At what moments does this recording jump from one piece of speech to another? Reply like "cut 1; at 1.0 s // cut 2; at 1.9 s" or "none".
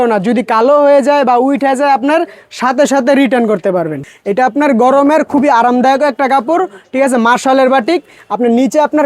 cut 1; at 4.0 s